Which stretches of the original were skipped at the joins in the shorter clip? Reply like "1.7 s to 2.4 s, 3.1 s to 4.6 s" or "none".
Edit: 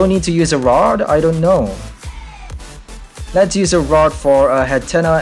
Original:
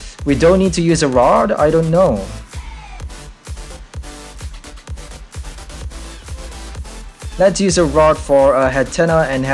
3.4 s to 6.9 s